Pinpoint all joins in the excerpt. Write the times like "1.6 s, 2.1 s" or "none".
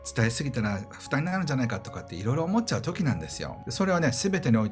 3.6 s